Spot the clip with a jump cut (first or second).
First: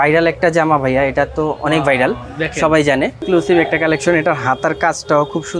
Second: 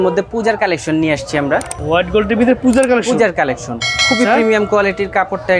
second